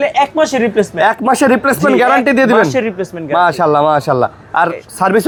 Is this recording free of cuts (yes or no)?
yes